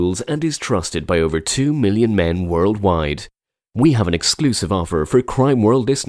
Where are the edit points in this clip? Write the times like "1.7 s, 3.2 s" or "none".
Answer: none